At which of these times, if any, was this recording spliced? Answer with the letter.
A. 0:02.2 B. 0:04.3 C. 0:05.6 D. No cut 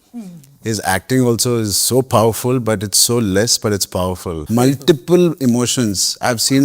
B